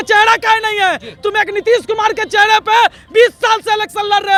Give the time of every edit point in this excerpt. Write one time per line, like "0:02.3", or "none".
none